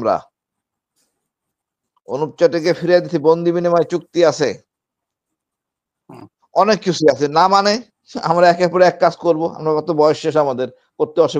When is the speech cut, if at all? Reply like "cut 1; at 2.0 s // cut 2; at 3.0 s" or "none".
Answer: none